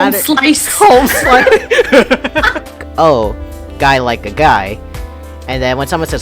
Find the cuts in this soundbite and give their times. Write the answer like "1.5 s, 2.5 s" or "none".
2.8 s